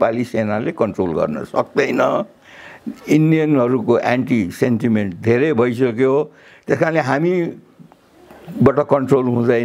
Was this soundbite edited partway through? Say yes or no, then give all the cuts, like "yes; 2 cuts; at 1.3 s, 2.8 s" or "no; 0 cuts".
no; 0 cuts